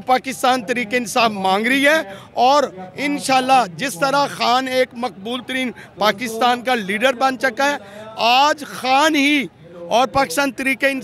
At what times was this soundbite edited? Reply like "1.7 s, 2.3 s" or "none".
none